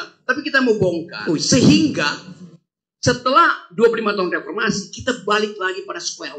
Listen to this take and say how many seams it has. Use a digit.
1